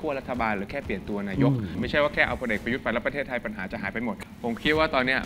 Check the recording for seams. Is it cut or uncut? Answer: cut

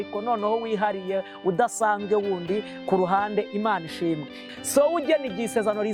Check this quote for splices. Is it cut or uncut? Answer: cut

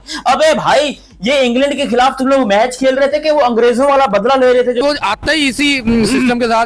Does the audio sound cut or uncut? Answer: cut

